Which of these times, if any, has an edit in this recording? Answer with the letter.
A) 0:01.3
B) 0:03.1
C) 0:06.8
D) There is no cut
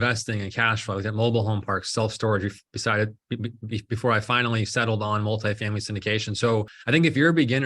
C